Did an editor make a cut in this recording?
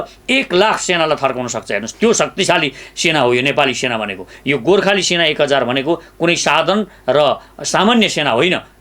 yes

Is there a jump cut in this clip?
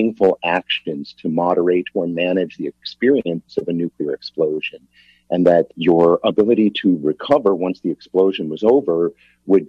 yes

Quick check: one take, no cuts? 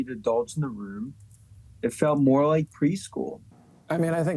no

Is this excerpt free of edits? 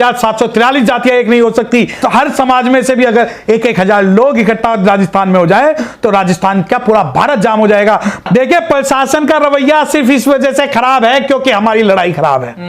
no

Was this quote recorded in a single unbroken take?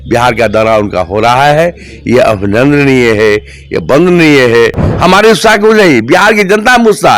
no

